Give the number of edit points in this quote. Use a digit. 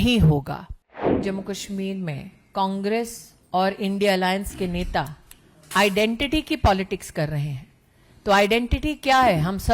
1